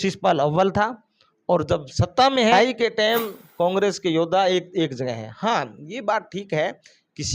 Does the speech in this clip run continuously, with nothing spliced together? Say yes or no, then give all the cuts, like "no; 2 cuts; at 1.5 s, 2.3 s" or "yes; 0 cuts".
no; 1 cut; at 2.6 s